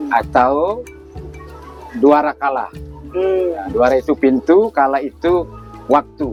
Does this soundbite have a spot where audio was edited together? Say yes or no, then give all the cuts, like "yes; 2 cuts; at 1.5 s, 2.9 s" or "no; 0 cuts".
no; 0 cuts